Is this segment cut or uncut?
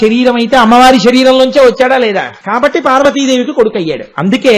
cut